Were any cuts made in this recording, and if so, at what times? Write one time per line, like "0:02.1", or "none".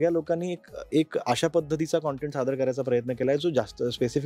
none